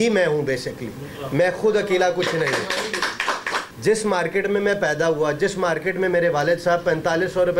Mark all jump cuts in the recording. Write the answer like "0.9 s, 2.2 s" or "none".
3.6 s